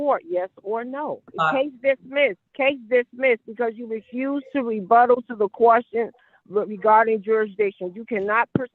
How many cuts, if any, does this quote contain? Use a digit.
2